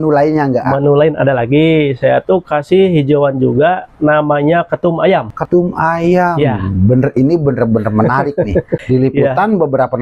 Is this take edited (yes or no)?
yes